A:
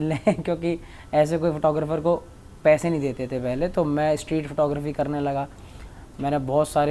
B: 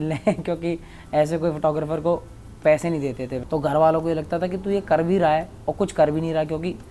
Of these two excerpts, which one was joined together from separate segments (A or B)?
B